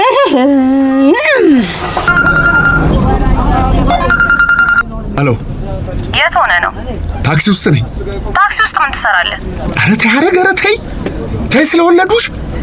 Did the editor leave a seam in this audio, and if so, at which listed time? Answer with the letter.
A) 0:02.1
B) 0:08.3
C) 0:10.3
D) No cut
A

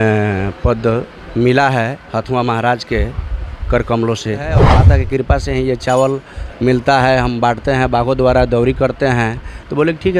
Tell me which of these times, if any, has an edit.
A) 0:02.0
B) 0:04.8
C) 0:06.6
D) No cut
B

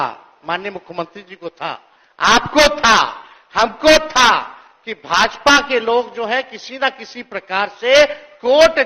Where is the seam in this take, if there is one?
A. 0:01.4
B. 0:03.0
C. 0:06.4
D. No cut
D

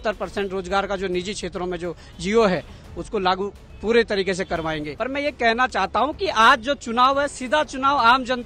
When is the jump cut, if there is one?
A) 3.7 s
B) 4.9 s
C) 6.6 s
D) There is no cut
B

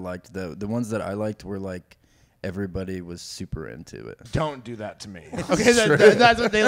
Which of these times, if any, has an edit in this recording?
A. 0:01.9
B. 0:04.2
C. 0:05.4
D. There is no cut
B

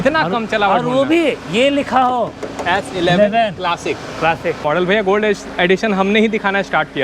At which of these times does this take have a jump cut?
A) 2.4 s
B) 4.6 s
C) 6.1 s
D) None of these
B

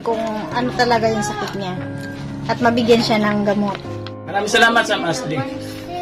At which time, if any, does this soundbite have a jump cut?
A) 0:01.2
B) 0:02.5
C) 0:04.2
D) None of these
C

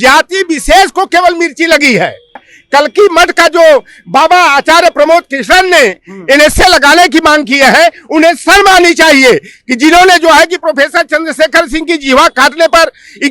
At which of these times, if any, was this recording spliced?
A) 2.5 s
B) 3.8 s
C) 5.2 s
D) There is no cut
A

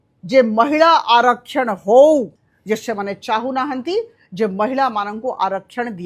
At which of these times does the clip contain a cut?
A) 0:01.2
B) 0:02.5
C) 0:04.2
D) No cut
B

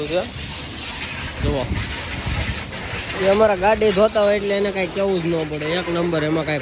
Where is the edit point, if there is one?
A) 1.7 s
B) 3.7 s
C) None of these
C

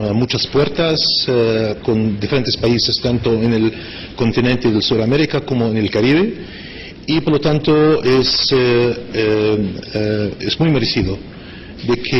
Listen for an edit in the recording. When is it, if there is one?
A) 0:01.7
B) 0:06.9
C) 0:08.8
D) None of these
A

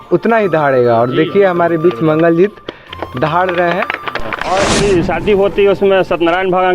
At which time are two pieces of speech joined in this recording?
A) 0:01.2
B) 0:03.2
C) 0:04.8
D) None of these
C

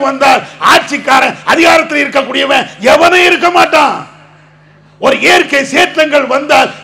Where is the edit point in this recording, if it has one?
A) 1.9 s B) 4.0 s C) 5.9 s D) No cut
D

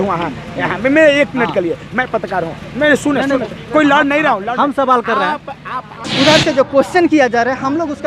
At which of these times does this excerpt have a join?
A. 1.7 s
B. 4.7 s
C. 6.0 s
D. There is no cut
C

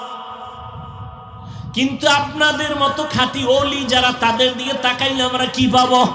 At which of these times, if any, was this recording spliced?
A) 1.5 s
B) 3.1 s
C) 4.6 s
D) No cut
D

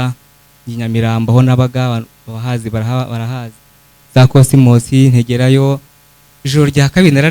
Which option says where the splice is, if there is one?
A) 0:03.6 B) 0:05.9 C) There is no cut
B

